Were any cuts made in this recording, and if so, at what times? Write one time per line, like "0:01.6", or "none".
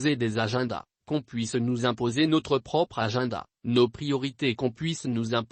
0:04.6